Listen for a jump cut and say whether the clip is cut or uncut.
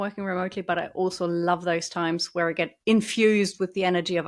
cut